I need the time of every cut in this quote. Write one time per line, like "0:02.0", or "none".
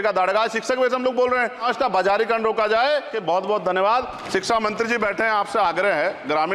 0:01.6
0:03.1
0:04.2